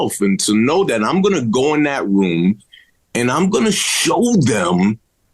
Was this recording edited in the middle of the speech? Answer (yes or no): no